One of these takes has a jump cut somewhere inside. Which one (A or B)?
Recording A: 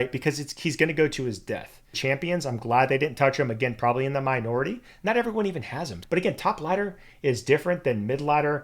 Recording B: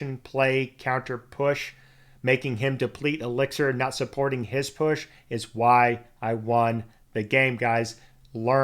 A